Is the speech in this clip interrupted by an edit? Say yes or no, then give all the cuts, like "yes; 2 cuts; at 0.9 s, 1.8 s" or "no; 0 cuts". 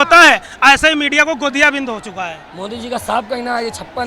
yes; 1 cut; at 2.5 s